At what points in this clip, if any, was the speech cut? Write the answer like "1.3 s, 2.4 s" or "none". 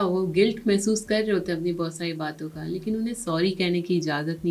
none